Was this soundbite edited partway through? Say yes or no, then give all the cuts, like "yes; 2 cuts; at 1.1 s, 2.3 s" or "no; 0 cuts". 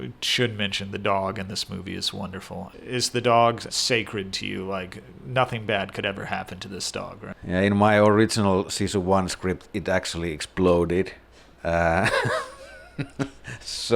yes; 2 cuts; at 2.7 s, 3.7 s